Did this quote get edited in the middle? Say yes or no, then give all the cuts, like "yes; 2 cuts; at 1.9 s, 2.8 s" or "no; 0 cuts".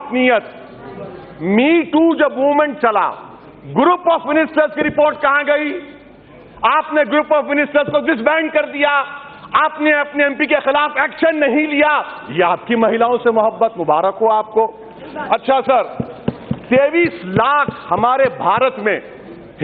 no; 0 cuts